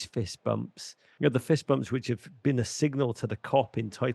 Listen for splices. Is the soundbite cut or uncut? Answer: cut